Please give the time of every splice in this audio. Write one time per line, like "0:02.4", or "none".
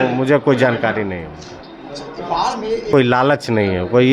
0:02.9